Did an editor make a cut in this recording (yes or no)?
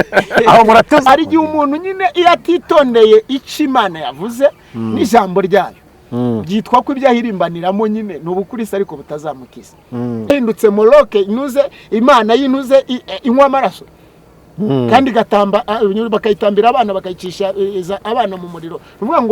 yes